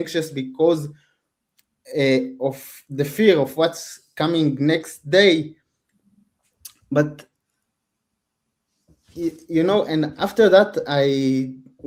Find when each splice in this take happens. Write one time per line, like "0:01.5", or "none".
none